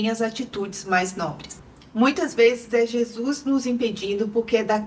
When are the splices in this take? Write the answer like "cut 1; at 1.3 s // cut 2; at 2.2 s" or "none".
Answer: cut 1; at 1.7 s